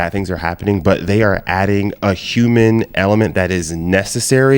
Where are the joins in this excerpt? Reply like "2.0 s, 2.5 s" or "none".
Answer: none